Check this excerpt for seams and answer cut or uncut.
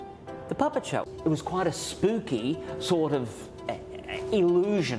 cut